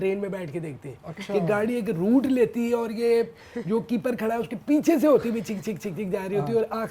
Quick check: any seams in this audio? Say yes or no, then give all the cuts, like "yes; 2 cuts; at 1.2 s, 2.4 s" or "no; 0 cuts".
no; 0 cuts